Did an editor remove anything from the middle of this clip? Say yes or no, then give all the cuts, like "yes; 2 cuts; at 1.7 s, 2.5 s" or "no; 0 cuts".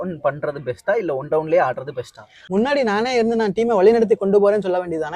yes; 1 cut; at 2.3 s